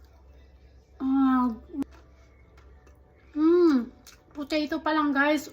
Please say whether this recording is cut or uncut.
cut